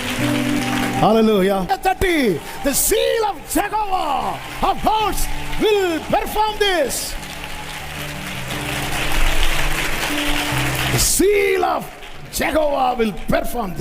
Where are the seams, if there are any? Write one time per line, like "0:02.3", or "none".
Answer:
0:01.7